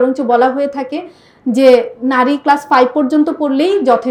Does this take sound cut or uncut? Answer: uncut